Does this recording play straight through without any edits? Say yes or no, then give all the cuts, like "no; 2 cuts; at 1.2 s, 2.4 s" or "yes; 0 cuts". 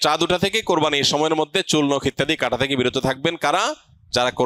yes; 0 cuts